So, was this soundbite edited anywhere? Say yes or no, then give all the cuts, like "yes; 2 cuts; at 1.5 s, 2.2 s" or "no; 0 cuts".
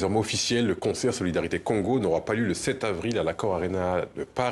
no; 0 cuts